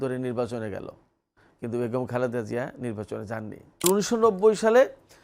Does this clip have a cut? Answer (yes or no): yes